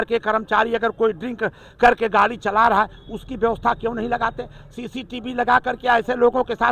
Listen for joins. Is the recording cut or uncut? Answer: uncut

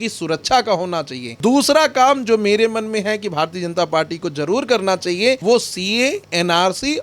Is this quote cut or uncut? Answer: cut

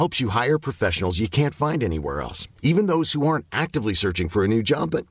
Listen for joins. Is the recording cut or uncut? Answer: uncut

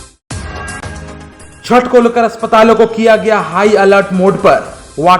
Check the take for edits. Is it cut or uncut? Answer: cut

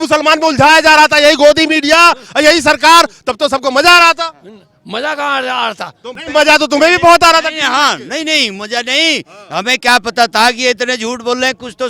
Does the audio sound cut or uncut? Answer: cut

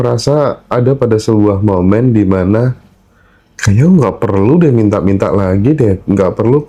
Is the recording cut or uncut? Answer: uncut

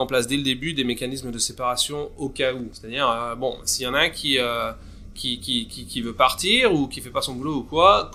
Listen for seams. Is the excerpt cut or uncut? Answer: uncut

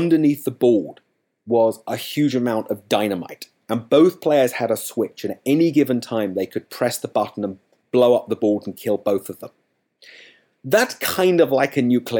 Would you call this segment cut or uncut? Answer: uncut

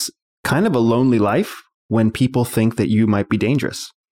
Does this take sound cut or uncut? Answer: uncut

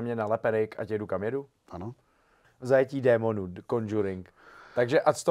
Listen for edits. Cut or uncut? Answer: cut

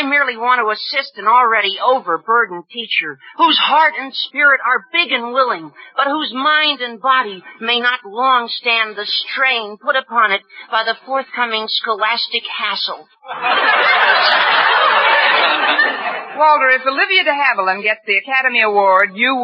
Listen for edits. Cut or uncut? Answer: cut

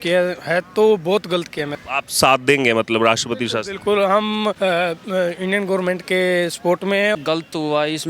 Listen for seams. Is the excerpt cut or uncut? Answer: cut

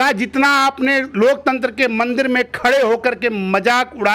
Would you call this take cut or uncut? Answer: uncut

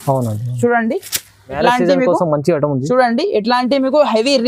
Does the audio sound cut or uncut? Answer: cut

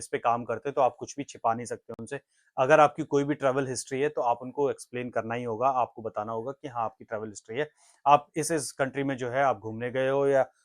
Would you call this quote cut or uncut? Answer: uncut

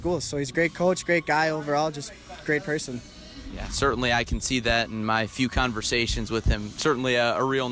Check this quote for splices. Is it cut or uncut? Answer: uncut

